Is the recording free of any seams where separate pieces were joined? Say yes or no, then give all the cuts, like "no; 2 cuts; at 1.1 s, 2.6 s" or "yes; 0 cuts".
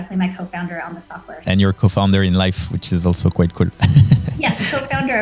no; 1 cut; at 1.4 s